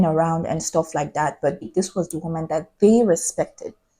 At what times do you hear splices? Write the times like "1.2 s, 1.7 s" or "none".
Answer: 1.7 s